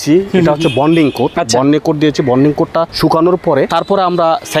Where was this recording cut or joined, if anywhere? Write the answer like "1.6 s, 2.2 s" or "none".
1.4 s, 2.9 s, 3.7 s